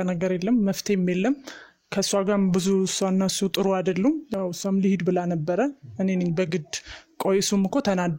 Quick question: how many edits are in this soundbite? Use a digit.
0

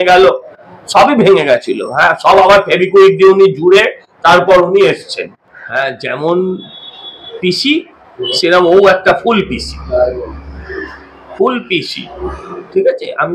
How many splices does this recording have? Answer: 1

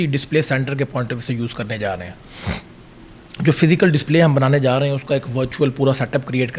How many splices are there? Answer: 0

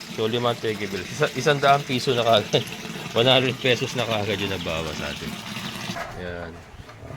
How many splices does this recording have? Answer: 1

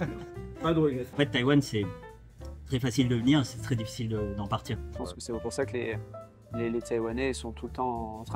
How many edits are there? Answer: 2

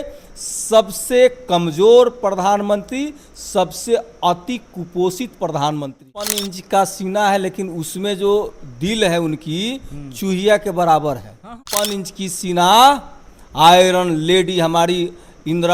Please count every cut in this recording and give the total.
2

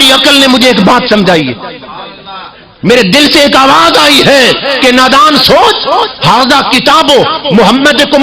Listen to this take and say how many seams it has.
0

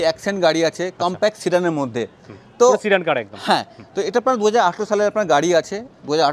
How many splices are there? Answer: 0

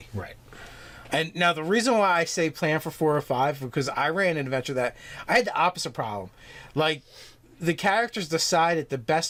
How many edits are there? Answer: 0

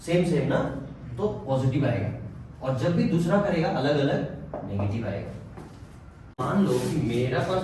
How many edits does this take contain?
1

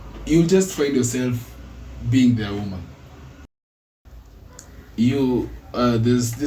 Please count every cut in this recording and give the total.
1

